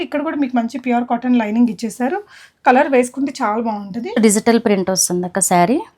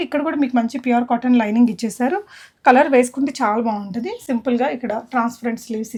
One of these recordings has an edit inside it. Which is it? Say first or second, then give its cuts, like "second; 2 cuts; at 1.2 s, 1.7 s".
first; 1 cut; at 4.1 s